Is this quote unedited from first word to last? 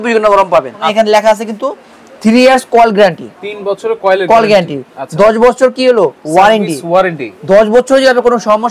no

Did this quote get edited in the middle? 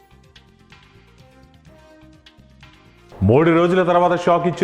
yes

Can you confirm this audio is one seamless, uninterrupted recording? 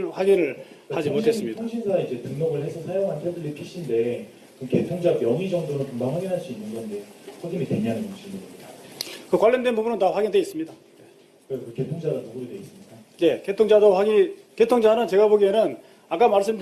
no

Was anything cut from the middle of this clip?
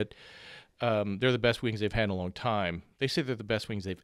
no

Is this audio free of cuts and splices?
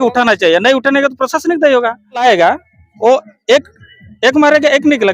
no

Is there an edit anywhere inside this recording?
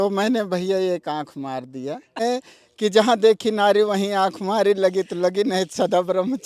yes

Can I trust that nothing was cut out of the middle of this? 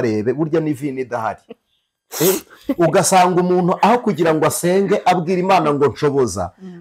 yes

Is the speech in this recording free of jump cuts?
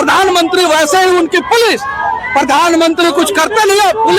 yes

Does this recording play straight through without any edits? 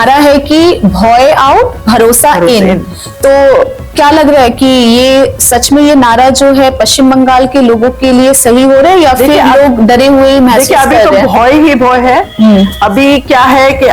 yes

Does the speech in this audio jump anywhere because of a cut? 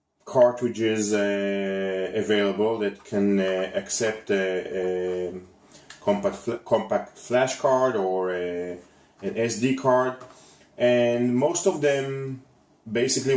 yes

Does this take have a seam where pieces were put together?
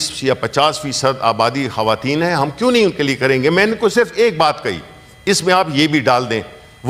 no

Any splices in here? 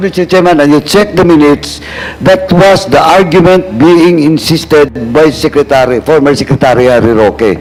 no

